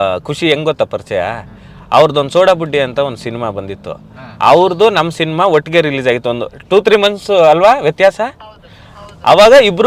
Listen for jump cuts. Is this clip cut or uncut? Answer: uncut